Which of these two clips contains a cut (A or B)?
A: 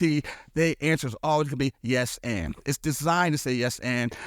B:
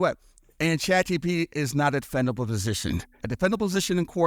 B